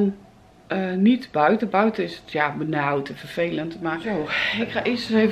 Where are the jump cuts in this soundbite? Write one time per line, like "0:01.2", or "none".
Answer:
0:04.0